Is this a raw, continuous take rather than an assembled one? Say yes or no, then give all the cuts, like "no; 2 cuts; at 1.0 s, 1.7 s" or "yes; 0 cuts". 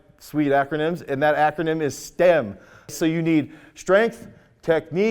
no; 1 cut; at 2.9 s